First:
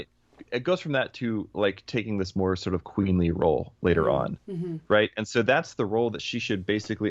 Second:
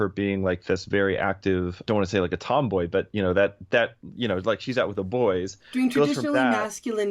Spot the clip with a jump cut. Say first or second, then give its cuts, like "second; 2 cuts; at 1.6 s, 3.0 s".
second; 1 cut; at 1.8 s